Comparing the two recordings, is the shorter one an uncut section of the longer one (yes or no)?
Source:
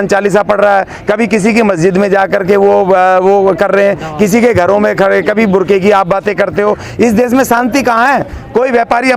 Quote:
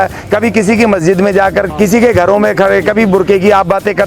no